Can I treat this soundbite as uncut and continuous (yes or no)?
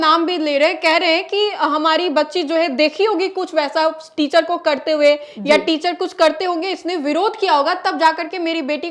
yes